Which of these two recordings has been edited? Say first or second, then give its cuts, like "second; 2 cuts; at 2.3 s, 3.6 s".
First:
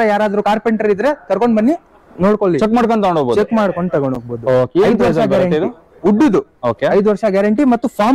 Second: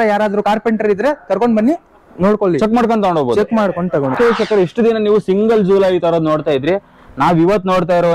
second; 1 cut; at 4.2 s